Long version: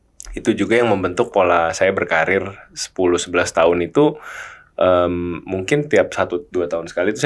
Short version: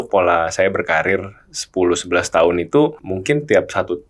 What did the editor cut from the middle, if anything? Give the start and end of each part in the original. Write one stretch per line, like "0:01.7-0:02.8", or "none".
0:04.3-0:05.5